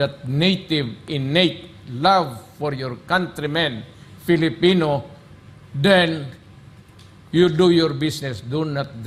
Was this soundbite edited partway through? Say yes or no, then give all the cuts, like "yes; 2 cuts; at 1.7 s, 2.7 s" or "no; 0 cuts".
no; 0 cuts